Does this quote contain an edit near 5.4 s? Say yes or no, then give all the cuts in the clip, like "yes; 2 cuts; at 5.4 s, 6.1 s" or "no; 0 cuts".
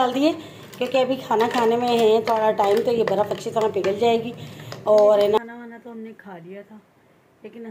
yes; 1 cut; at 5.4 s